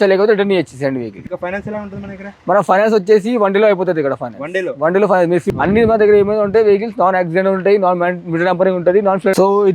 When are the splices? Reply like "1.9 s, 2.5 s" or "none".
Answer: 1.2 s, 5.4 s